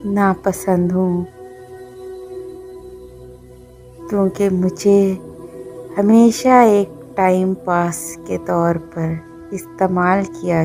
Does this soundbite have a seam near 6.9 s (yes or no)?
no